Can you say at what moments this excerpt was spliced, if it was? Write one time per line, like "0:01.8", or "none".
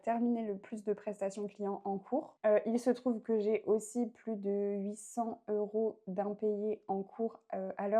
0:02.3